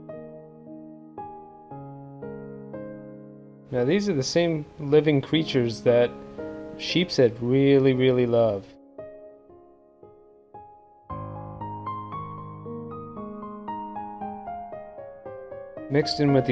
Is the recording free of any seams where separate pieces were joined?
no; 1 cut; at 1.2 s

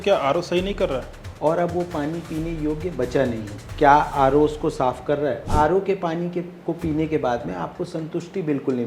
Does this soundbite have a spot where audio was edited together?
yes; 3 cuts; at 1.2 s, 3.7 s, 5.5 s

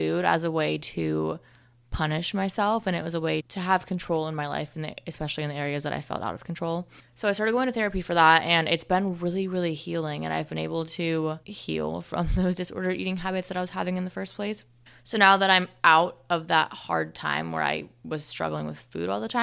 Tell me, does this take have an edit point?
no; 0 cuts

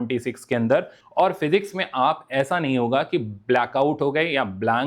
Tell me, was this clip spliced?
yes; 1 cut; at 1.0 s

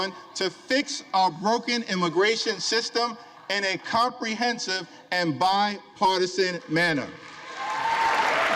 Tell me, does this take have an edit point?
no; 0 cuts

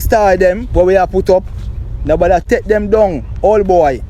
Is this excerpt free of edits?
no; 1 cut; at 2.5 s

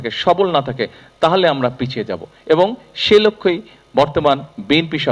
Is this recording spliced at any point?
no; 0 cuts

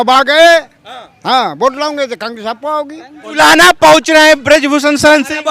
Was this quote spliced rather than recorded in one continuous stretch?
yes; 1 cut; at 3.2 s

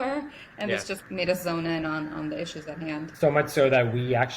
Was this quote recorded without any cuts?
no; 2 cuts; at 1.0 s, 3.1 s

